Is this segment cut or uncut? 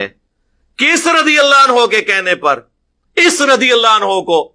uncut